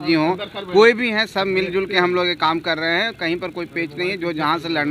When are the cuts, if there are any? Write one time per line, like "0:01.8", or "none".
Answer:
none